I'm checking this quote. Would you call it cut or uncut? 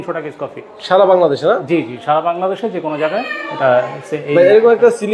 uncut